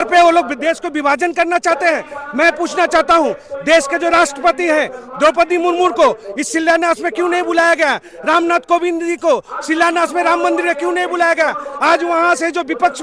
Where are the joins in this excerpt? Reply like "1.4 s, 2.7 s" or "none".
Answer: none